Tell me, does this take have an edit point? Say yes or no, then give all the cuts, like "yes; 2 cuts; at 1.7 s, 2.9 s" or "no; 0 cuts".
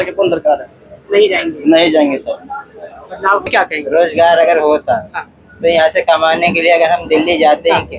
yes; 1 cut; at 3.5 s